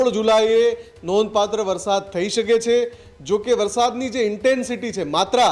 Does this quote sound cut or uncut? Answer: uncut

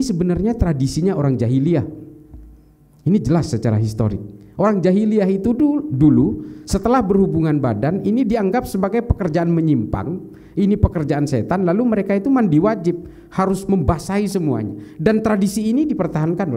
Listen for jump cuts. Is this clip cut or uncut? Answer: uncut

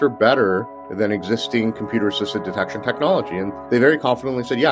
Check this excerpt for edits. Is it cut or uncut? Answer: cut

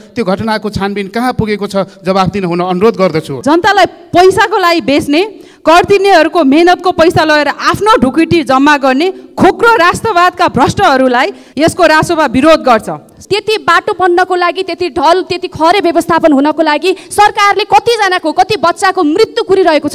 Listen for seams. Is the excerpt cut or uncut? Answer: cut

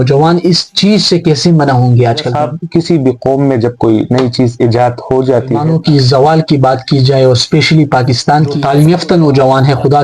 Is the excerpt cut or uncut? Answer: cut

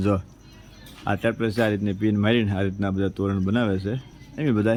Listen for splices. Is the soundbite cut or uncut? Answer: uncut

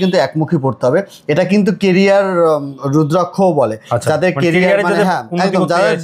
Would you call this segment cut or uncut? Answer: uncut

